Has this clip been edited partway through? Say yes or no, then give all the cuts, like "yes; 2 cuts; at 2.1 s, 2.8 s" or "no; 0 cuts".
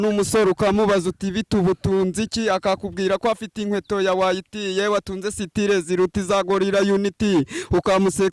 no; 0 cuts